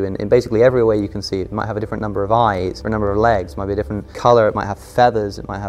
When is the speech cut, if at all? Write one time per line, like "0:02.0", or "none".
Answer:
0:02.8
0:04.0